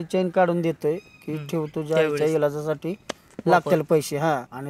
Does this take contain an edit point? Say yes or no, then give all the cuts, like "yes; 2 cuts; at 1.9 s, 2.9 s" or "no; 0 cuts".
no; 0 cuts